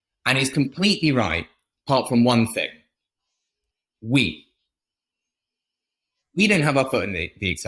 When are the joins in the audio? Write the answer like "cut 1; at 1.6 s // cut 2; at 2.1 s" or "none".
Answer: cut 1; at 3.6 s

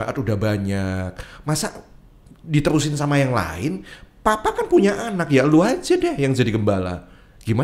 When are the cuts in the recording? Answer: none

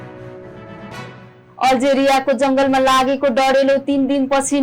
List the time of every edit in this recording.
cut 1; at 1.2 s

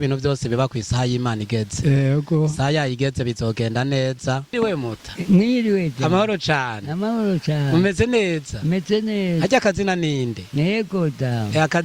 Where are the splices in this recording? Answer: cut 1; at 4.5 s

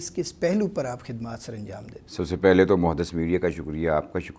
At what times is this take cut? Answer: none

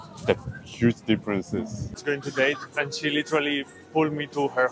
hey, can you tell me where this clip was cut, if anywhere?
cut 1; at 2.0 s

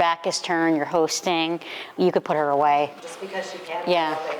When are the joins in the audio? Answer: cut 1; at 3.0 s

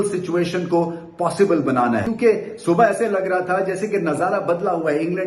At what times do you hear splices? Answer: cut 1; at 2.1 s

